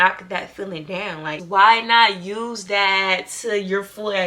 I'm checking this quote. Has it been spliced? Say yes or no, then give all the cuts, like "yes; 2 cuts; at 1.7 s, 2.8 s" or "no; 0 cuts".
yes; 1 cut; at 1.4 s